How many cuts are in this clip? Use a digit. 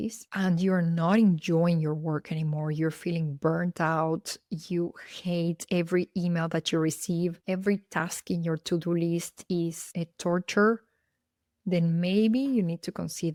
0